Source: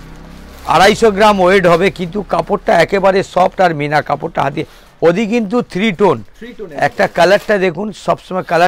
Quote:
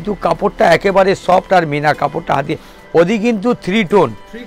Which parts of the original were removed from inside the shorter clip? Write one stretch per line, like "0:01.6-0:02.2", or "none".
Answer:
none